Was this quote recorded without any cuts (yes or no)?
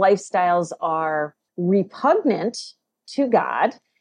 no